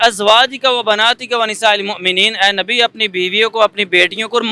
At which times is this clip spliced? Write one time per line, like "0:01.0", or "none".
none